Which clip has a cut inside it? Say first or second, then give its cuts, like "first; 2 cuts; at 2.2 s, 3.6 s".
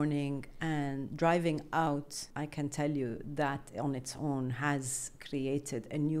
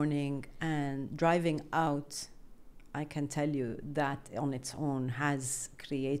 first; 1 cut; at 2.2 s